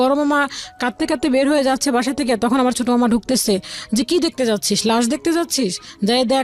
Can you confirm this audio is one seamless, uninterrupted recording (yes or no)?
yes